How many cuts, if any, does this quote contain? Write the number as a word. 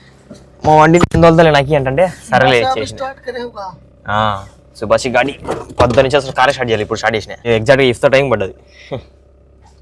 one